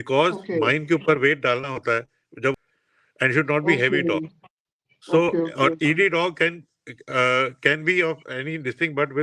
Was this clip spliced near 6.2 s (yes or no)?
no